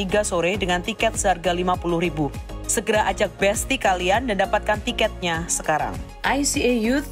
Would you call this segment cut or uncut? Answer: cut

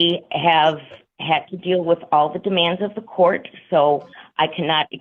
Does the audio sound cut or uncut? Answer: uncut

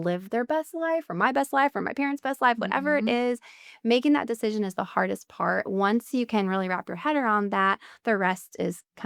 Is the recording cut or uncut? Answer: uncut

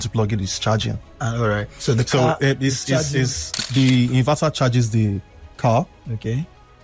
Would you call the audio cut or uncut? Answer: cut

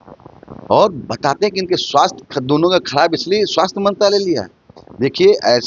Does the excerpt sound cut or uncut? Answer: uncut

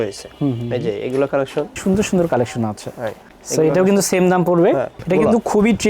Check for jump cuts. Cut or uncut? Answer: cut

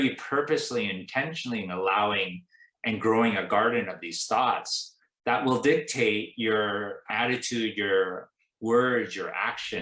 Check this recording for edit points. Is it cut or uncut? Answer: cut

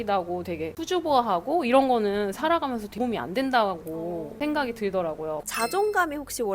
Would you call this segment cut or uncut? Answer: cut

